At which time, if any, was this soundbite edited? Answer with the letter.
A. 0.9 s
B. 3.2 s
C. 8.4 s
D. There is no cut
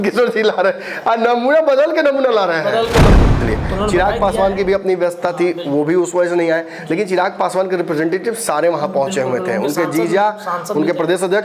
B